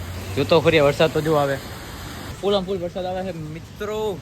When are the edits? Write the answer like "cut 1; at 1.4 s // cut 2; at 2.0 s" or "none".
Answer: cut 1; at 2.3 s

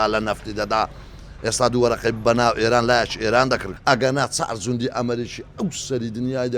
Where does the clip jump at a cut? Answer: cut 1; at 3.7 s

